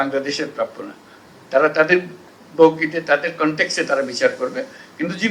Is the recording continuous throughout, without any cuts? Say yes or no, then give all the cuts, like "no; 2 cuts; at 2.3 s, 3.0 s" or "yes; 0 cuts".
yes; 0 cuts